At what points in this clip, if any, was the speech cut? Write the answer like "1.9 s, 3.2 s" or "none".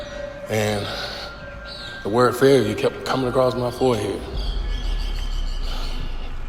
none